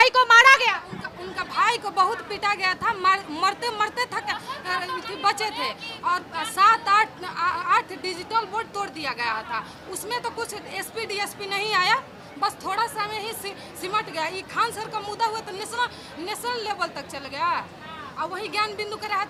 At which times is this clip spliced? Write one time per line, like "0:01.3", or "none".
none